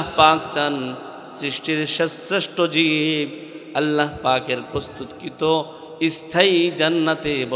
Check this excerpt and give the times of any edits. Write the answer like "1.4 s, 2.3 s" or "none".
none